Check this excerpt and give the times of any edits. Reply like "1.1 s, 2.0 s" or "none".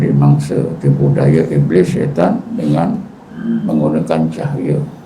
none